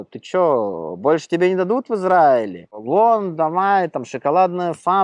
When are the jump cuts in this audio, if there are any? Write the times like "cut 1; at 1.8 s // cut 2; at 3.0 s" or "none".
cut 1; at 2.8 s